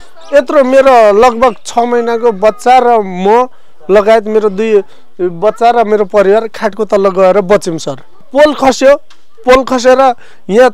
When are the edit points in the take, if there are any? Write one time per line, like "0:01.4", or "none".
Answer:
0:08.3